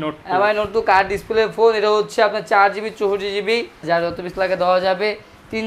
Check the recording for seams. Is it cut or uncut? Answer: cut